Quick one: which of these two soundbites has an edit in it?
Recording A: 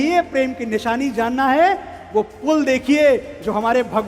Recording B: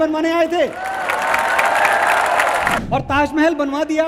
B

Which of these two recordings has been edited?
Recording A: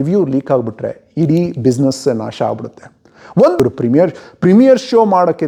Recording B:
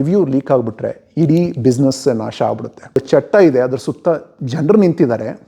B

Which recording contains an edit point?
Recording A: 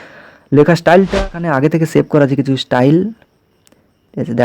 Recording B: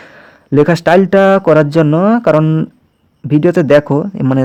A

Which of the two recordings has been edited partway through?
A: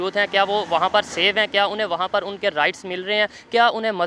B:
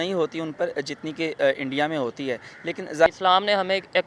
B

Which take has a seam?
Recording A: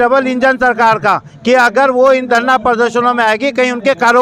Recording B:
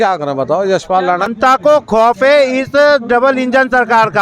B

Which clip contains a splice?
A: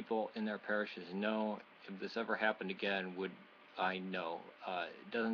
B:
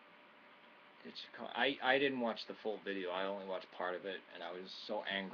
B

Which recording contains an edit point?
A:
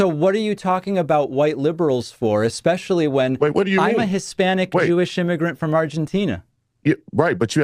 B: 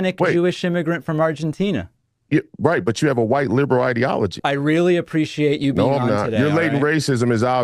B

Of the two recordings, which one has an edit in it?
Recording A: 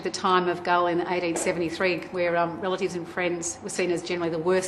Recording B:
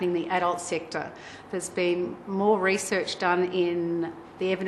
A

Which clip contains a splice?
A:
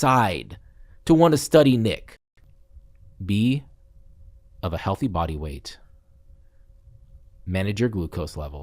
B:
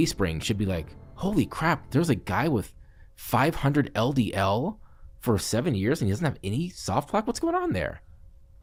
A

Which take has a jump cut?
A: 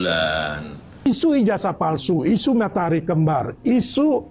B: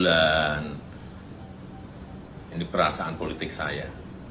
A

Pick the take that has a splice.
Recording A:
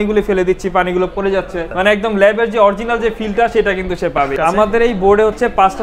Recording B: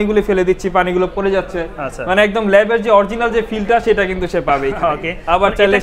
A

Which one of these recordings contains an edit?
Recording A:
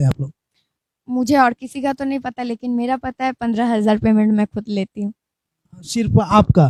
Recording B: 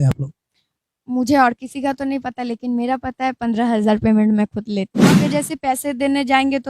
B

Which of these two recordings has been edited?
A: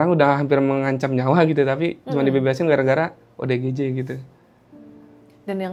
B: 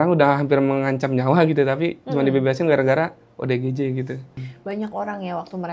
B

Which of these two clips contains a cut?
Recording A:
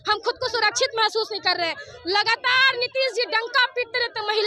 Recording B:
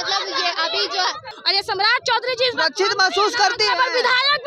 B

